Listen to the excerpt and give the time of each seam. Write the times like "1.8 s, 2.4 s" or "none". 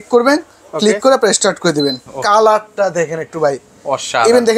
2.1 s